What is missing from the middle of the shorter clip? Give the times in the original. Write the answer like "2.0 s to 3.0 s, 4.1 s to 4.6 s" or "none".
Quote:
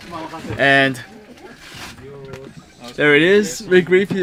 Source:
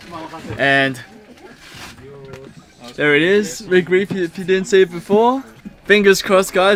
none